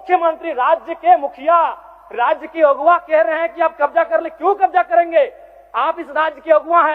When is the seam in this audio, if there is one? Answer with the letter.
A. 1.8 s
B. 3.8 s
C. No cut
C